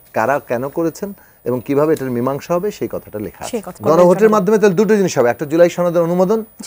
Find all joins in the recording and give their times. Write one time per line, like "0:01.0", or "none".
0:03.8